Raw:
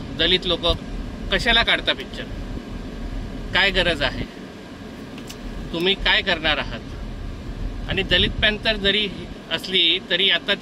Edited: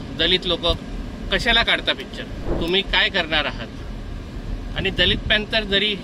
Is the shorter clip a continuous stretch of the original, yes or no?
no